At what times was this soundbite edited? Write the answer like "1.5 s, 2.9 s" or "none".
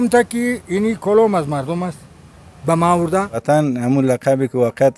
3.4 s